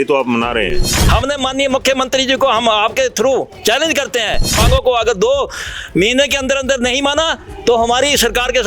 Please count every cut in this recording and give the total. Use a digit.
2